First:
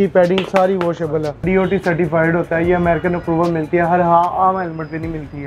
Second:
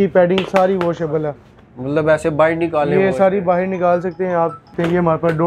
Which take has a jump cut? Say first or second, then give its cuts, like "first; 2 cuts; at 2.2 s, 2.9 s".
first; 1 cut; at 1.4 s